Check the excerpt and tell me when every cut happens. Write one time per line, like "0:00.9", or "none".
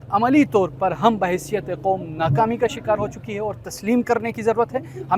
none